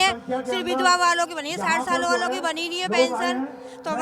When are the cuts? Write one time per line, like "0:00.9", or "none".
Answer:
none